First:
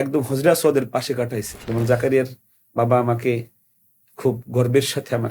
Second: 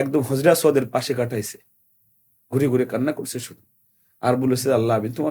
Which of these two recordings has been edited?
first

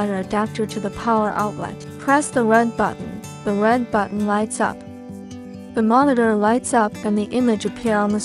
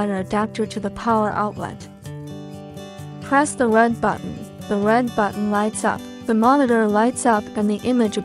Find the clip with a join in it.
second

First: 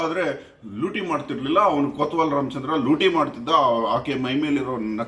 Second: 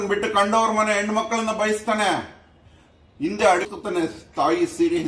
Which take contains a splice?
second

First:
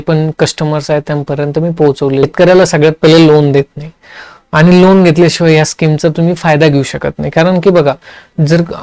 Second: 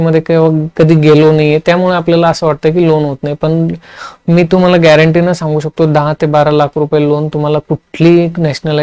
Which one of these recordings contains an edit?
first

